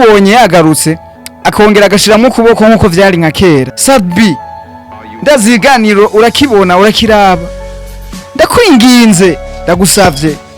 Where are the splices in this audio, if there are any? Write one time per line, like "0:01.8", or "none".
0:03.7